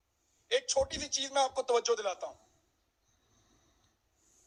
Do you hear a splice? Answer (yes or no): no